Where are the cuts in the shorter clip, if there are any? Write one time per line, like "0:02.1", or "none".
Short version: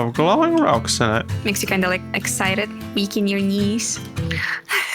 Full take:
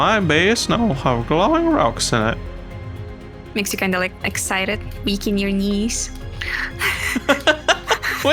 0:01.3